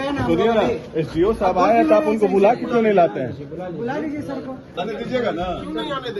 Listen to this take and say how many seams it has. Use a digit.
1